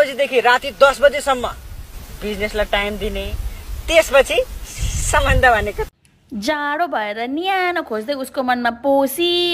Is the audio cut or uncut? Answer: cut